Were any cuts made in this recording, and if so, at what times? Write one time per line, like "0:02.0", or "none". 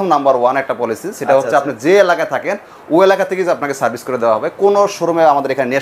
none